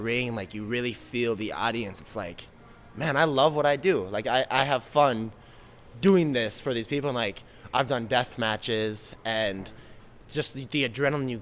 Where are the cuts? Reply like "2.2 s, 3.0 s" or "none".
none

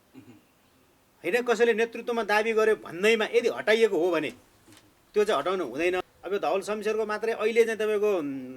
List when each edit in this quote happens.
6.0 s

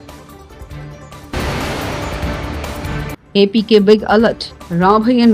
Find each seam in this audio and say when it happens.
none

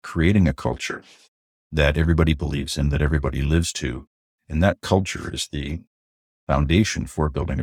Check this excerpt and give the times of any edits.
none

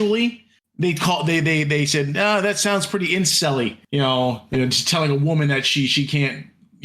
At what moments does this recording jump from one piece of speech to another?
3.8 s

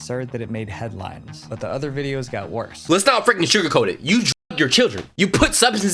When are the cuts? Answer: 2.9 s

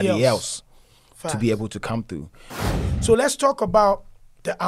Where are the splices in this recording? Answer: 2.6 s

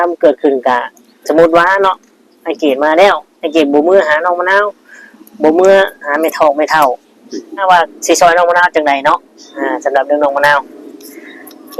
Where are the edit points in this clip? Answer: 7.6 s

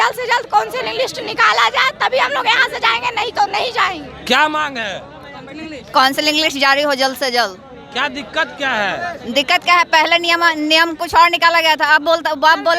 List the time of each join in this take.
none

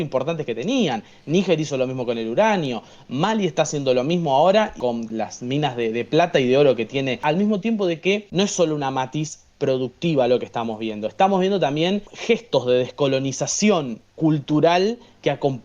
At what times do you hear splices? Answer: 4.8 s, 7.2 s, 8.3 s, 12.1 s

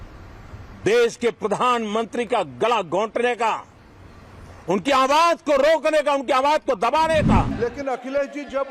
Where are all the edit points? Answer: 7.5 s

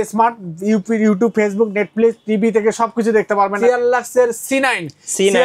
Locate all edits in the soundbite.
3.5 s

